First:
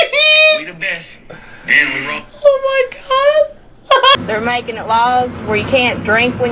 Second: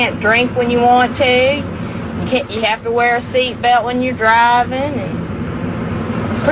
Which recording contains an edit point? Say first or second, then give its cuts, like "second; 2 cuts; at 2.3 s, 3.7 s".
first; 1 cut; at 4.1 s